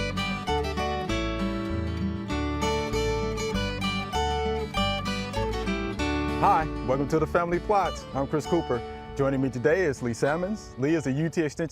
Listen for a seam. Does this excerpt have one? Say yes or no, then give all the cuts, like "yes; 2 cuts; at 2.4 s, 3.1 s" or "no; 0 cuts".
yes; 1 cut; at 3.3 s